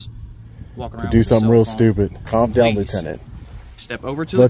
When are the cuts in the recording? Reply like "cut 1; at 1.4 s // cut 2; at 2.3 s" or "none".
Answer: cut 1; at 2.2 s

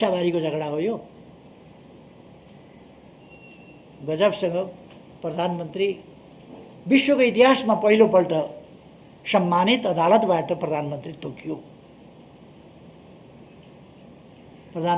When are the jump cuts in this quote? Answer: none

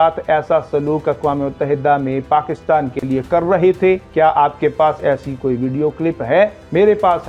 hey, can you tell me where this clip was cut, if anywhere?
none

